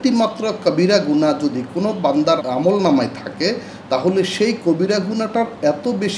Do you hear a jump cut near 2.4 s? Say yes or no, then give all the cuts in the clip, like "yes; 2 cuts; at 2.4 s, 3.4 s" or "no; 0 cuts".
yes; 1 cut; at 2.4 s